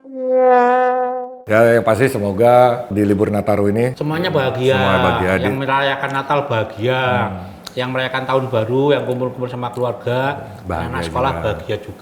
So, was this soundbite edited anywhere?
yes; 3 cuts; at 1.3 s, 2.9 s, 4.0 s

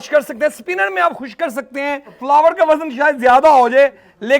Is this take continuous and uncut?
no; 1 cut; at 2.2 s

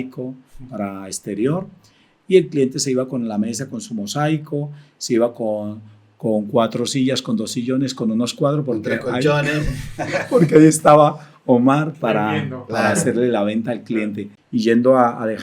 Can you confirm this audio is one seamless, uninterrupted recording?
no; 1 cut; at 14.3 s

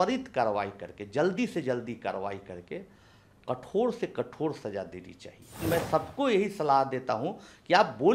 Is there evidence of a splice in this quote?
yes; 1 cut; at 5.6 s

